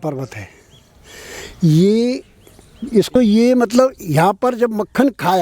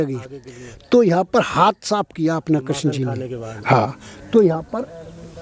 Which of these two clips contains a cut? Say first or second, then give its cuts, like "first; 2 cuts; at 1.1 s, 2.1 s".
first; 1 cut; at 3.1 s